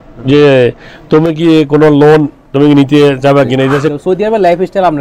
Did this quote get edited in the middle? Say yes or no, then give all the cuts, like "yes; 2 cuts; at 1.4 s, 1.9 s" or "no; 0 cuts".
yes; 1 cut; at 3.9 s